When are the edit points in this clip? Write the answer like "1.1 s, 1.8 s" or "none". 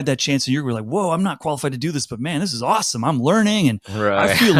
none